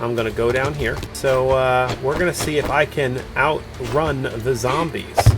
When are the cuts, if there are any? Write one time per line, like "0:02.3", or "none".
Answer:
0:01.1